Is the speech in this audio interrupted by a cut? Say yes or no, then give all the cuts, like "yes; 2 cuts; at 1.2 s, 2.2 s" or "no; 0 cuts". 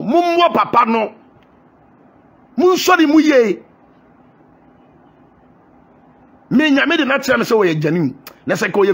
no; 0 cuts